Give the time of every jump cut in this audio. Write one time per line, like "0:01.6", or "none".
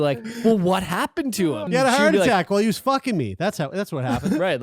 0:01.7